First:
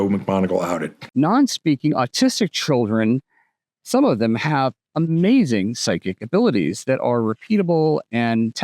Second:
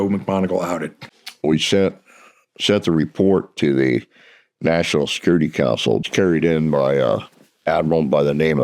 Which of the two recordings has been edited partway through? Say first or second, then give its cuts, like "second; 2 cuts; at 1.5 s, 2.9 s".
first; 1 cut; at 1.0 s